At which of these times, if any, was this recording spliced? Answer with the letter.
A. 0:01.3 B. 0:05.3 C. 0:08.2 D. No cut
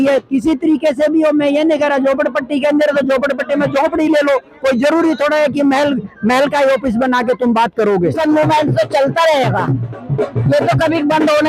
C